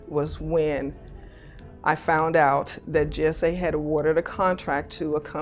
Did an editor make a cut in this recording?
no; 0 cuts

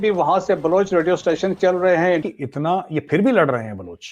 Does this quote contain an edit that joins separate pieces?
yes; 1 cut; at 2.2 s

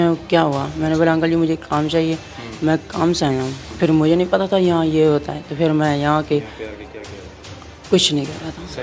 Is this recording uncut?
no; 1 cut; at 3.6 s

